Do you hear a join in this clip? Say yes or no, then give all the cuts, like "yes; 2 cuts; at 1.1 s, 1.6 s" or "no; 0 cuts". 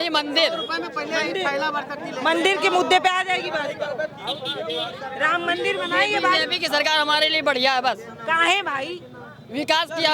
no; 0 cuts